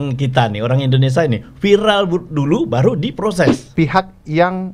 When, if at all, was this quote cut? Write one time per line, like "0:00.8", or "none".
0:03.6

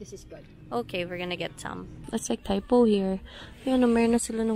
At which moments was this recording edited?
0:02.1

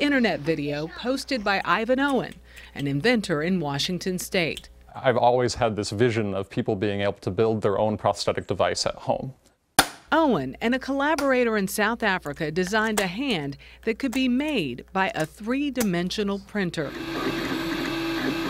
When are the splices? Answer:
none

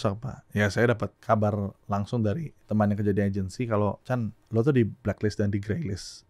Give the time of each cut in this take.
0:01.1
0:02.5
0:04.1

